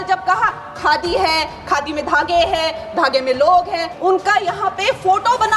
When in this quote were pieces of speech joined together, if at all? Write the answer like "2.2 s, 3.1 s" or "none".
3.9 s